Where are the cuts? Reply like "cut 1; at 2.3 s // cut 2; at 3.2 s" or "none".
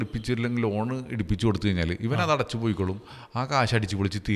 none